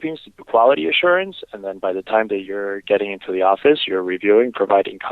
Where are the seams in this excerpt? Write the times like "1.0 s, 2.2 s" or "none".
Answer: none